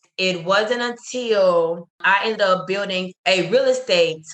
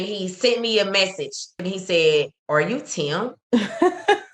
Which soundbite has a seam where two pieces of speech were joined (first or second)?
second